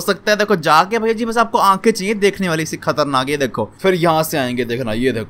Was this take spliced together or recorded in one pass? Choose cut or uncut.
cut